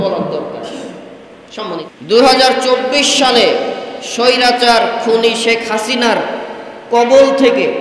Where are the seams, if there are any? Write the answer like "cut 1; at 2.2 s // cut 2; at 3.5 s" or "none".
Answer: cut 1; at 1.8 s